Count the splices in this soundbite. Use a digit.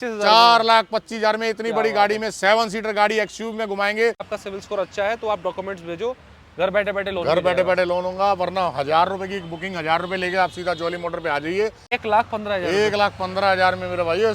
2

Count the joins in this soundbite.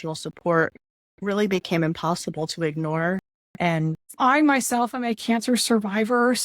1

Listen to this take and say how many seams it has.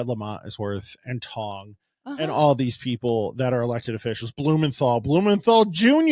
0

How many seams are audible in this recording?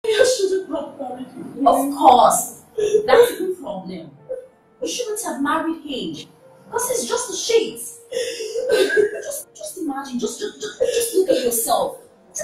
0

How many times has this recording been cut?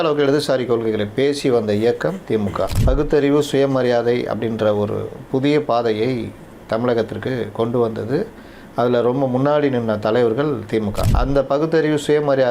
2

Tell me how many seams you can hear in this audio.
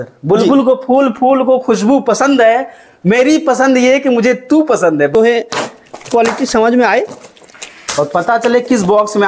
1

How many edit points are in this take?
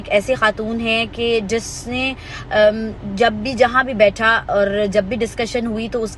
0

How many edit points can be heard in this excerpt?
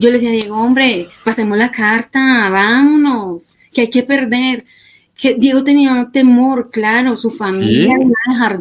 0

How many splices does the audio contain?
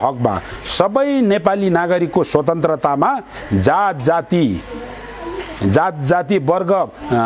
0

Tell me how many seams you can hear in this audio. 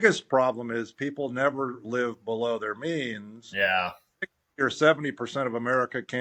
0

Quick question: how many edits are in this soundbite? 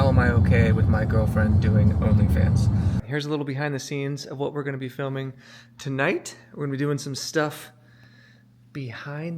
1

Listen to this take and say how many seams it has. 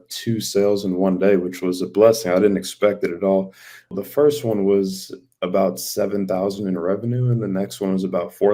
1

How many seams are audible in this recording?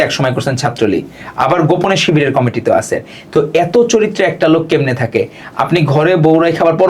0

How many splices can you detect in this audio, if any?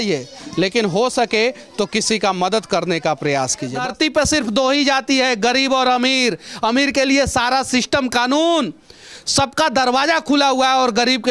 1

